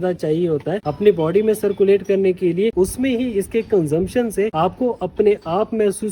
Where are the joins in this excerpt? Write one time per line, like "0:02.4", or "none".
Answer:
0:02.7
0:04.5